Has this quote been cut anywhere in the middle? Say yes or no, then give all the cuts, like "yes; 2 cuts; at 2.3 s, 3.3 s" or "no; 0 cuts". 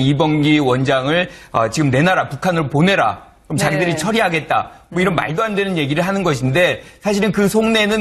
yes; 1 cut; at 4.8 s